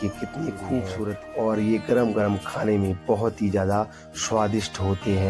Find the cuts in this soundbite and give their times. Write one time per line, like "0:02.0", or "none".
0:01.2